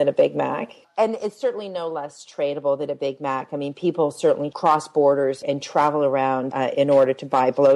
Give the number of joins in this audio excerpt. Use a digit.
4